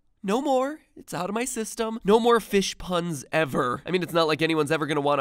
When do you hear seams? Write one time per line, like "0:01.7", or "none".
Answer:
0:03.5